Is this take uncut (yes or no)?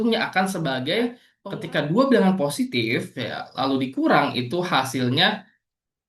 no